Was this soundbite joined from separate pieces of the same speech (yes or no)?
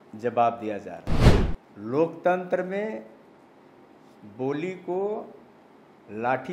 no